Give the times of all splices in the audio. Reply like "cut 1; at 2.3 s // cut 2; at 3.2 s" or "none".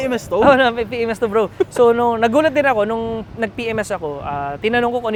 none